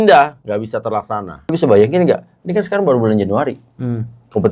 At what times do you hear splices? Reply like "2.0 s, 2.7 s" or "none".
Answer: 1.3 s